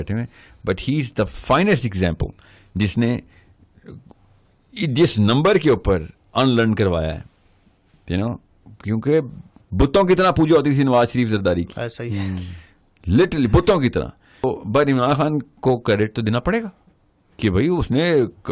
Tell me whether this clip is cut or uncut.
cut